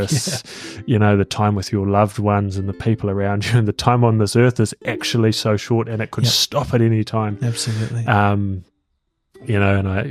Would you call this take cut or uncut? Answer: uncut